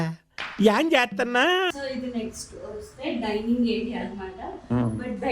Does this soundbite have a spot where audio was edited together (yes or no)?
yes